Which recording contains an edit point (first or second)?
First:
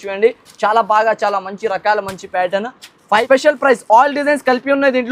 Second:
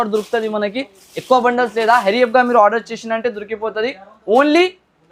first